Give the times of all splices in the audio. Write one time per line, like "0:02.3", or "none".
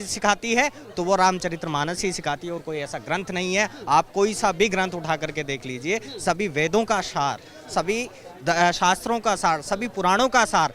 none